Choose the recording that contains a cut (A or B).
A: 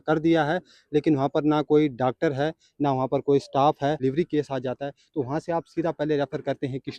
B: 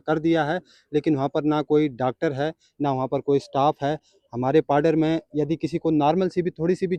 A